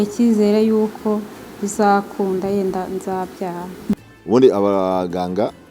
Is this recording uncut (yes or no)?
no